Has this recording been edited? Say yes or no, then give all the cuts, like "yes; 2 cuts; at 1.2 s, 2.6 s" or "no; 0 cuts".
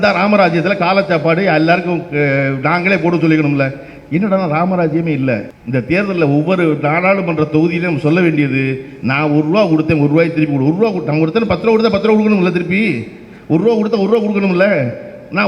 yes; 1 cut; at 5.5 s